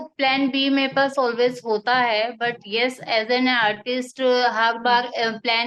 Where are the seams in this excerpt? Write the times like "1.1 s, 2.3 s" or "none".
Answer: none